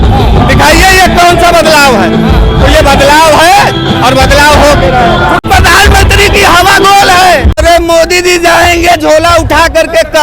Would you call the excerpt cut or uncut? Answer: cut